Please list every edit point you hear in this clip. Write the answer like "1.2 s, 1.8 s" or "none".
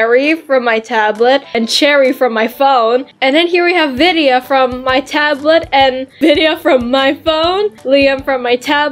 none